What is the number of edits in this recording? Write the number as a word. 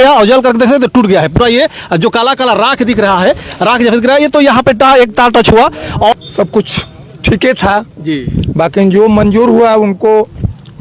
one